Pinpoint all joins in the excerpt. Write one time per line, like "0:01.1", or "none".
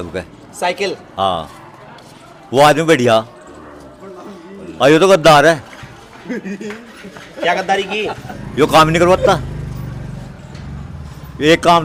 none